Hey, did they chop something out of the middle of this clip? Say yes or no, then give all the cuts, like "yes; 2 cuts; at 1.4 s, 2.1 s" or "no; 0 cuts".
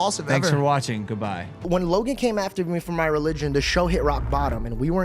yes; 1 cut; at 1.6 s